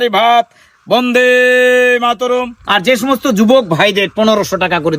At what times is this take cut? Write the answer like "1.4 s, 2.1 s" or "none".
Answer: 2.6 s